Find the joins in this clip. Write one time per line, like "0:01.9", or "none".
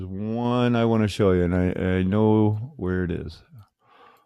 0:01.9